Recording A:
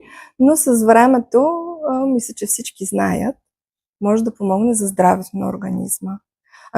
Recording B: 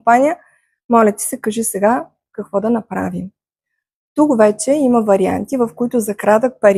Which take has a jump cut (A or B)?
A